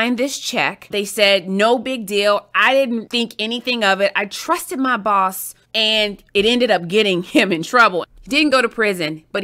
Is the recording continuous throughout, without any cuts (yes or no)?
no